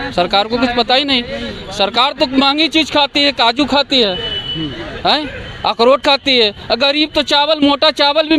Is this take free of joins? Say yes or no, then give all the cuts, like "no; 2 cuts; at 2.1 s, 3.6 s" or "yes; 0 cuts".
yes; 0 cuts